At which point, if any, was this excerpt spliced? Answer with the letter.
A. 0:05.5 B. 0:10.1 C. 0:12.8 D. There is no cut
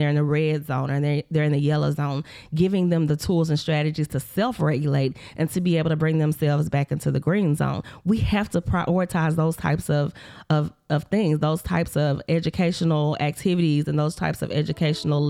D